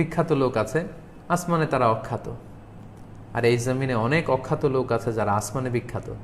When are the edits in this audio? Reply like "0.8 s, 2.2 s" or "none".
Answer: none